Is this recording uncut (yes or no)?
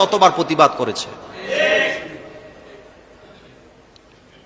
yes